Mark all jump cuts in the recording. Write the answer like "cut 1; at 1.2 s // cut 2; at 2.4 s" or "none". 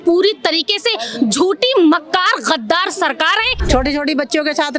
cut 1; at 3.6 s